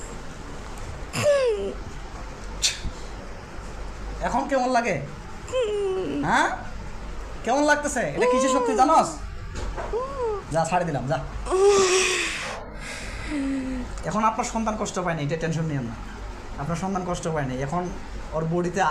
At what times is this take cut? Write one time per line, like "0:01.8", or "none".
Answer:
none